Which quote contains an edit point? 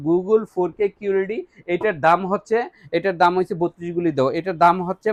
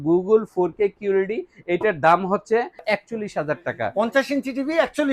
second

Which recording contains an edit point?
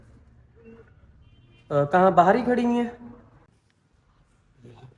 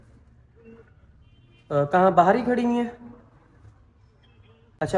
first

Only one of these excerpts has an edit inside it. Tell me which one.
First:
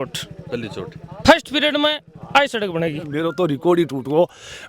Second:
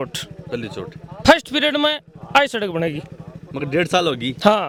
first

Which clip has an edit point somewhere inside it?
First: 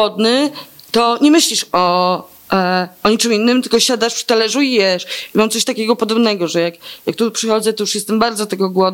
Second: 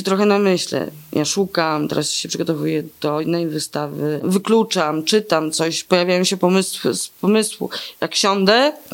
second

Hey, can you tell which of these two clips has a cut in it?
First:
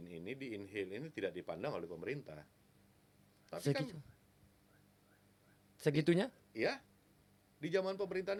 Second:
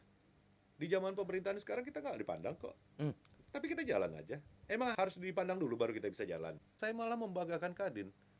second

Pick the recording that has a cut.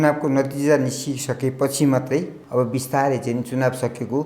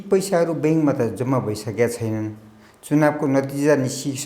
first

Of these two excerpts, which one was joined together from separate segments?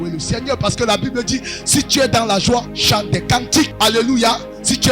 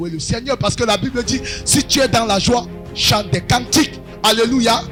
first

